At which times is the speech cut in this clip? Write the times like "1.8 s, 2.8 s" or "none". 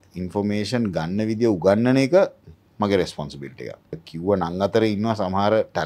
4.1 s